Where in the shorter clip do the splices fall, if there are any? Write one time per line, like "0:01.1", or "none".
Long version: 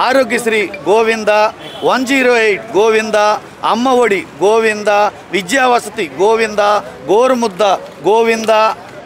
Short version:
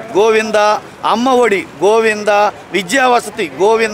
none